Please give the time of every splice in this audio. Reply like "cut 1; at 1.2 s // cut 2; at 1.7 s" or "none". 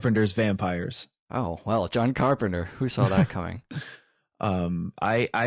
cut 1; at 3.1 s